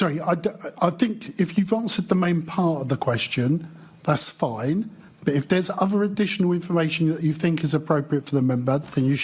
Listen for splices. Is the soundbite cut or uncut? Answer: uncut